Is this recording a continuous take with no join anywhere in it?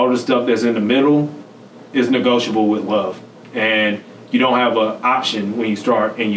yes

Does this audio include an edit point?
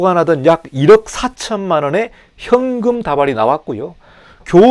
no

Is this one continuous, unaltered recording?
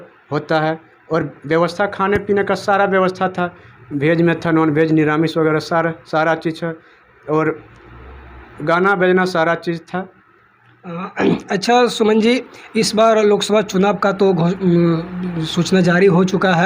yes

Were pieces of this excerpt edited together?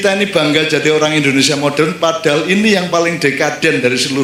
no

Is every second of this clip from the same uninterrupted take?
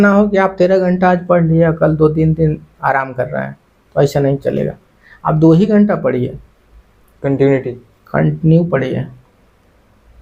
yes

